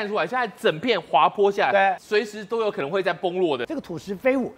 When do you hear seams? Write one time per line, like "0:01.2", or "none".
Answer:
0:02.0
0:03.7